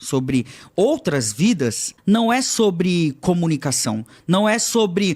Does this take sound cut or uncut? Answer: cut